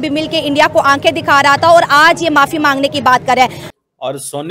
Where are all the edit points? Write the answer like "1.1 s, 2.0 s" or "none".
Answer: 3.6 s